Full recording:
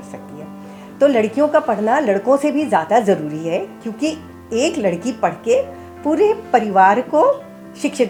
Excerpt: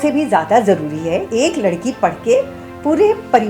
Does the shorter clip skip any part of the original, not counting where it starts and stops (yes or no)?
yes